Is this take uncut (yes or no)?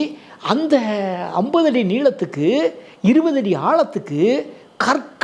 yes